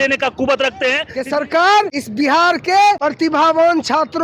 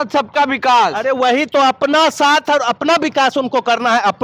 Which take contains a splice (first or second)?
first